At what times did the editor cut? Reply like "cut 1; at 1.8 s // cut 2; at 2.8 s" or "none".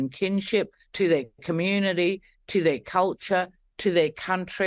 none

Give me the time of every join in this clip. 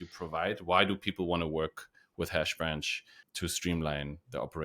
cut 1; at 3.2 s

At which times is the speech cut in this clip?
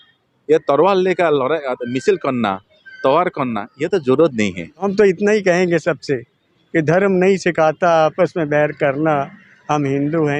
cut 1; at 4.8 s

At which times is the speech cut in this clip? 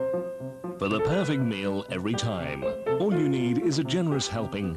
none

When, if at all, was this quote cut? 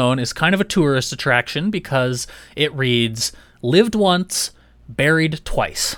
none

